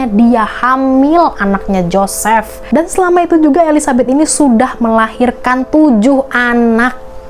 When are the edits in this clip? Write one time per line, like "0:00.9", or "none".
0:02.6